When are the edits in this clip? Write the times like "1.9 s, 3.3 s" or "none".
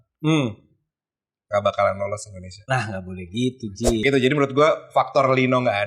4.0 s